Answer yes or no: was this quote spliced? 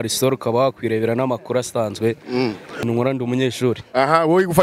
yes